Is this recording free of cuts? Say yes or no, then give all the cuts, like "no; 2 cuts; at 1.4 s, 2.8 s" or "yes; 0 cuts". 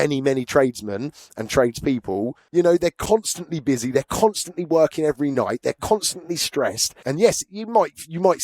no; 2 cuts; at 2.4 s, 6.9 s